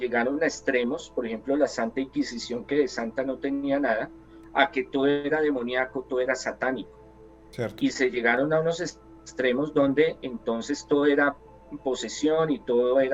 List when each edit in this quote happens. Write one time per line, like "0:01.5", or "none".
none